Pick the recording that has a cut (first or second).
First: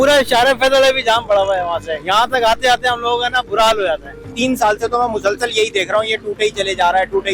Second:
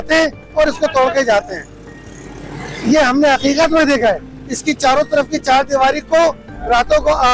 first